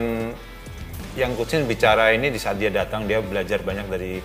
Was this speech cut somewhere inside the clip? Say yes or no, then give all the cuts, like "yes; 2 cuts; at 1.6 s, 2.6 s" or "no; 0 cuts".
no; 0 cuts